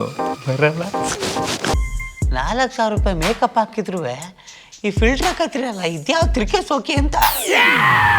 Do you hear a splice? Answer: yes; 1 cut; at 1.7 s

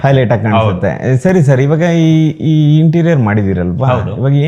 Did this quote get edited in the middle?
no; 0 cuts

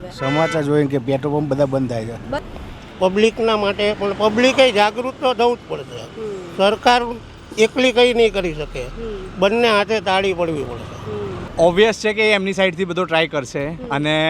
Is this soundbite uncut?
no; 2 cuts; at 2.4 s, 11.4 s

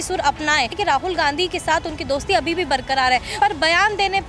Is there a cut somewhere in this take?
yes; 2 cuts; at 0.8 s, 3.3 s

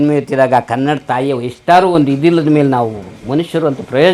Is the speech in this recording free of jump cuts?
yes; 0 cuts

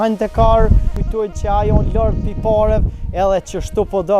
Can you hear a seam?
yes; 1 cut; at 1.0 s

